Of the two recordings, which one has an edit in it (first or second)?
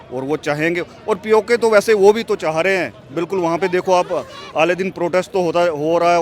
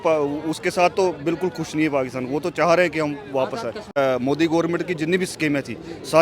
second